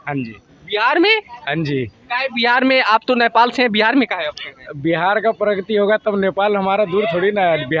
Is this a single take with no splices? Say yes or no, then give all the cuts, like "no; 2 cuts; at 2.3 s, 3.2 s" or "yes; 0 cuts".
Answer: yes; 0 cuts